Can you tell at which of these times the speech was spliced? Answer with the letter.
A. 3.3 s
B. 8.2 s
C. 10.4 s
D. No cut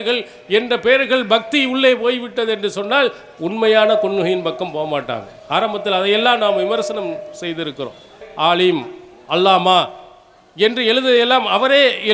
B